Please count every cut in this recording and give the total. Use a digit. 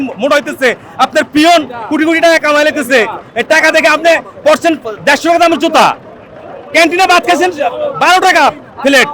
0